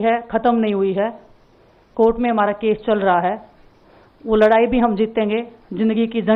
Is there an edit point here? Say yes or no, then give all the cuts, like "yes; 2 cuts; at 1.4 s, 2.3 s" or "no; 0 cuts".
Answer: no; 0 cuts